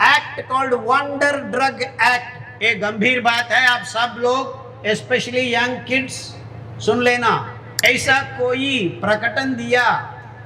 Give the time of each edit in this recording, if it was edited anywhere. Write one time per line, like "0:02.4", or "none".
0:07.6